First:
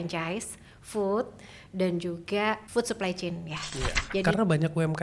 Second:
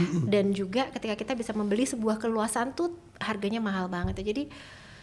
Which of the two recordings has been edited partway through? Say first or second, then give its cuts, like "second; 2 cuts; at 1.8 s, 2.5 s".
first; 2 cuts; at 2.6 s, 4.2 s